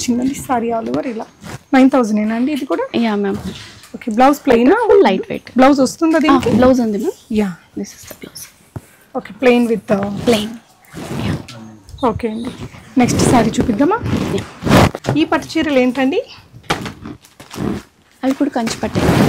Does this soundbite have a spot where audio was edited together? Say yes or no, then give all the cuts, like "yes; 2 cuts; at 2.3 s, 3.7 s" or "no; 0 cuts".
no; 0 cuts